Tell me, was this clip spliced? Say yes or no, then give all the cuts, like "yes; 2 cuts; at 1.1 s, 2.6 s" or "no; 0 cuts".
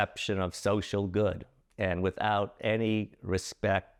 no; 0 cuts